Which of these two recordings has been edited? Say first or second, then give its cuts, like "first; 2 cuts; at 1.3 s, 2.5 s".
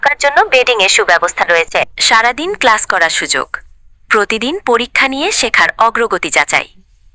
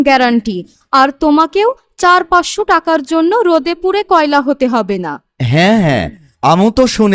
first; 1 cut; at 2.0 s